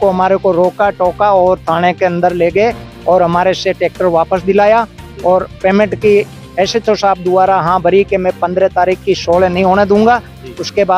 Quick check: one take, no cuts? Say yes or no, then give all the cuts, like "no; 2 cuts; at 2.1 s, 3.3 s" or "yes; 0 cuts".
yes; 0 cuts